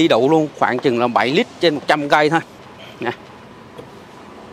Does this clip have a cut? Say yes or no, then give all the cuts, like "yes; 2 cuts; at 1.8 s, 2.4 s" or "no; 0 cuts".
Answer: no; 0 cuts